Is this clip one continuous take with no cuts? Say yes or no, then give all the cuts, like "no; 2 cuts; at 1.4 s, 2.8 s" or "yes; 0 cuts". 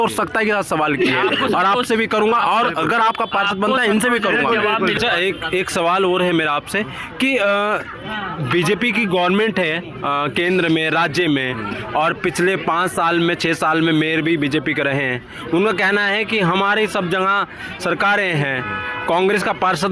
no; 1 cut; at 5.0 s